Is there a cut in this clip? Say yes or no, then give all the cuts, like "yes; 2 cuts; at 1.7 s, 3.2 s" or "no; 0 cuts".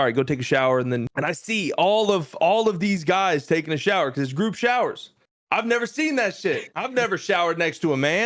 yes; 1 cut; at 1.1 s